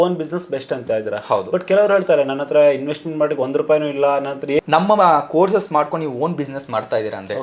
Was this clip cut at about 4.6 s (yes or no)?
yes